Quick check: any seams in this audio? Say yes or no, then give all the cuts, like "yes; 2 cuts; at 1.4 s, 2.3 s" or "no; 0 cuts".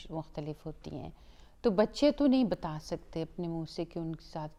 no; 0 cuts